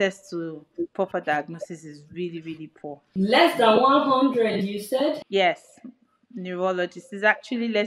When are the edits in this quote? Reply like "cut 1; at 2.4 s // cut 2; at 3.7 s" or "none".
cut 1; at 3.0 s // cut 2; at 5.2 s

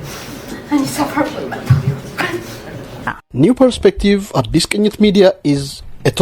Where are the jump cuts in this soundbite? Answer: cut 1; at 3.2 s

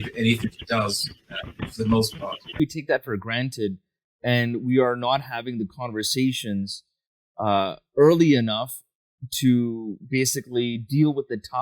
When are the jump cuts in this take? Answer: cut 1; at 2.6 s

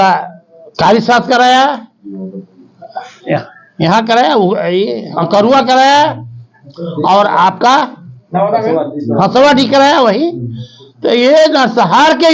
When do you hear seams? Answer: none

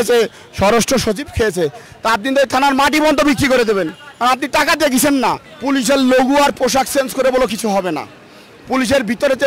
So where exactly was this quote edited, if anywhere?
cut 1; at 1.9 s // cut 2; at 5.5 s

